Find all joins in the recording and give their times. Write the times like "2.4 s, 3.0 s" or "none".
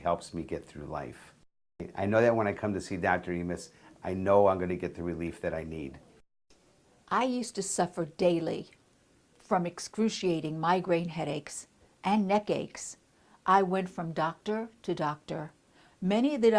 1.9 s, 6.4 s

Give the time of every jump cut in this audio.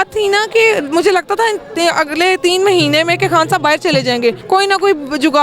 4.4 s

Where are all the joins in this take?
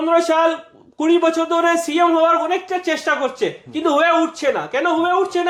none

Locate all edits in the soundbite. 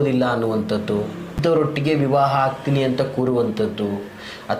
1.3 s

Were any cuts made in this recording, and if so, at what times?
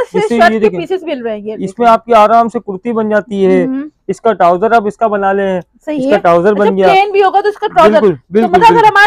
none

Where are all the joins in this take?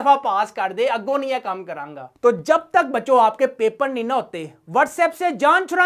2.0 s

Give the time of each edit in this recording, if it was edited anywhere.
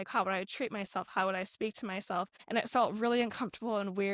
2.4 s

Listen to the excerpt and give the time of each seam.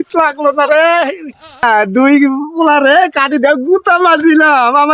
1.6 s

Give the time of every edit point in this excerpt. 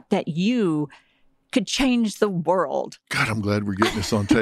none

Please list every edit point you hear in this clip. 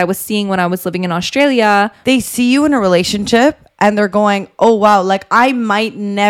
2.0 s

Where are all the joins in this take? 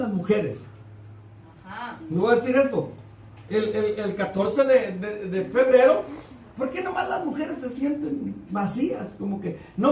8.2 s

